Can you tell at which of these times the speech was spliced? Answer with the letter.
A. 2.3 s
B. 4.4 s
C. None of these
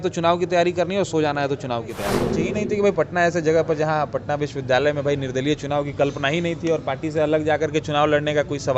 A